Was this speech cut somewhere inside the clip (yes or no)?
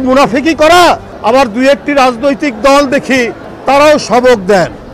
no